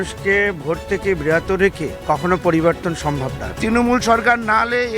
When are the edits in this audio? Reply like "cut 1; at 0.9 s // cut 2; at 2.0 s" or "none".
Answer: cut 1; at 1.9 s // cut 2; at 3.4 s